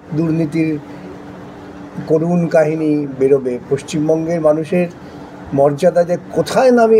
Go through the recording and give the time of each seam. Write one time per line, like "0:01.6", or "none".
none

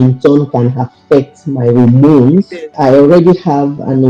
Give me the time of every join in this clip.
0:02.7

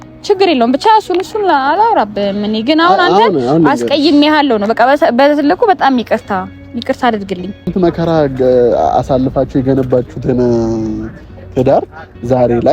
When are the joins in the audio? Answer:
0:07.7

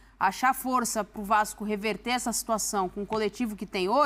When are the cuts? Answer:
none

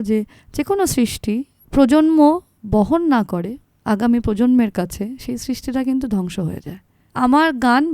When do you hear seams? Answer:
0:01.5
0:07.0

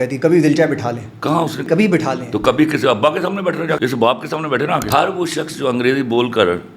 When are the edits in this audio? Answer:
0:01.6
0:03.8
0:04.9

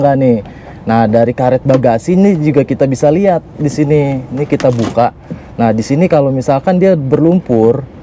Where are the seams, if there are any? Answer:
none

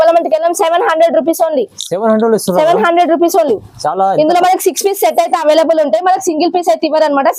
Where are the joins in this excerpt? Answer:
none

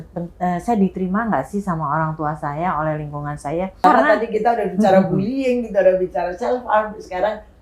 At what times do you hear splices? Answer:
0:03.8

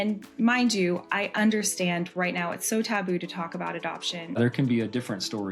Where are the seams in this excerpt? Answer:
0:04.3

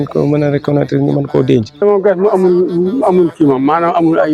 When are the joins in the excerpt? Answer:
0:01.8

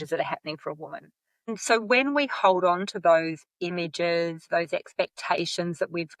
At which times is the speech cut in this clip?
0:01.5

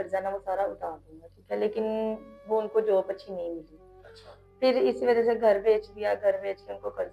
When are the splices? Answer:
none

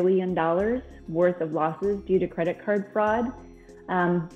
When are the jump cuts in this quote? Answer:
none

